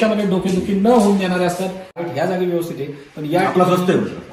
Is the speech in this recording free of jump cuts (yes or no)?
no